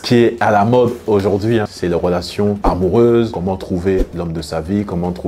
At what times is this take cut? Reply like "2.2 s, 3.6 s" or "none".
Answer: none

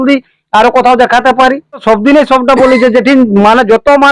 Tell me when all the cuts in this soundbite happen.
1.8 s

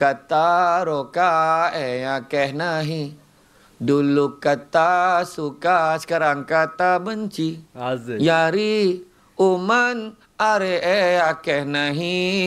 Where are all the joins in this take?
none

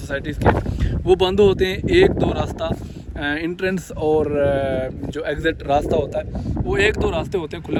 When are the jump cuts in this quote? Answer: none

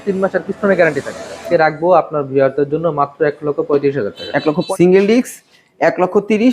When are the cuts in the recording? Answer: 1.4 s, 4.6 s

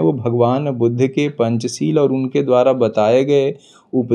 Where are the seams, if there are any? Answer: none

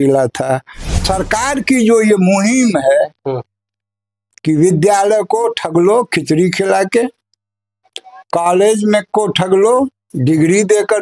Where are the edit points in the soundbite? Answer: 1.0 s

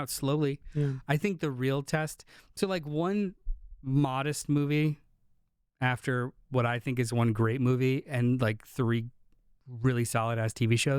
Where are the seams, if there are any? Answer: none

